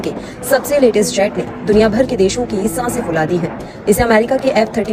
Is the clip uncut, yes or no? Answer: yes